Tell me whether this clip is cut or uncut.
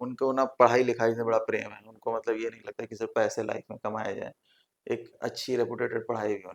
uncut